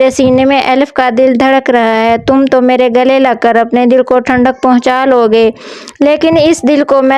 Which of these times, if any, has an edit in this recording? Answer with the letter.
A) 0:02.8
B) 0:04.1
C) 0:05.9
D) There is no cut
D